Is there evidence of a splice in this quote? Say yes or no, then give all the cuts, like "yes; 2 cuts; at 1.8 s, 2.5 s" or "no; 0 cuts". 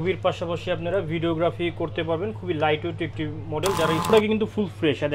yes; 1 cut; at 4.1 s